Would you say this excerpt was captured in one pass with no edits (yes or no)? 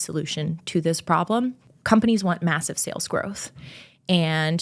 no